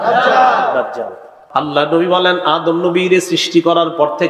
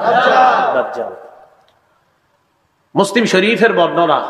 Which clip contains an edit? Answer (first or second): first